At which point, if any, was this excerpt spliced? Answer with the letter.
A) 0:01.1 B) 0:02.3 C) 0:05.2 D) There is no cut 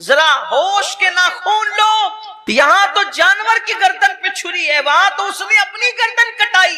B